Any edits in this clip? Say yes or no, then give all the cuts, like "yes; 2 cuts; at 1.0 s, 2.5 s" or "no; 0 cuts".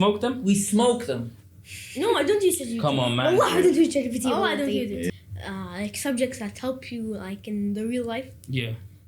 yes; 2 cuts; at 1.3 s, 5.1 s